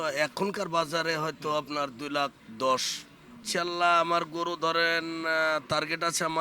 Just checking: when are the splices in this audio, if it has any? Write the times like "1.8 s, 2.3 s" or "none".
2.4 s, 3.4 s